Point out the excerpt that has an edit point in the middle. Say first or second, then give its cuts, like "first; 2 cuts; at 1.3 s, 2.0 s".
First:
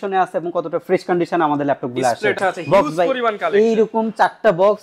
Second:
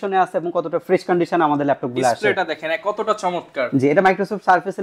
first; 1 cut; at 2.4 s